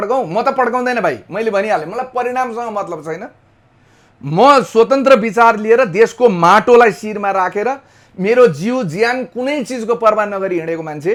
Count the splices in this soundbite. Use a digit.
0